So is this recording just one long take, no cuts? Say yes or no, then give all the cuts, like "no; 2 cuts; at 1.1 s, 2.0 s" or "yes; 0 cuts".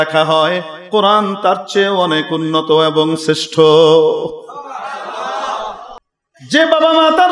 no; 1 cut; at 5.9 s